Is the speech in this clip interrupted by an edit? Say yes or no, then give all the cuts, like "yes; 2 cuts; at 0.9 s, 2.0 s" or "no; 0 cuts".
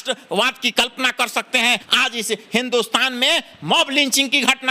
yes; 1 cut; at 1.8 s